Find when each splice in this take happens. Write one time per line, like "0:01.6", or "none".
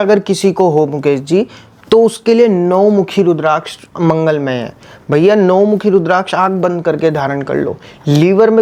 none